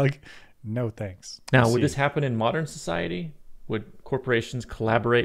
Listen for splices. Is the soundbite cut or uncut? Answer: cut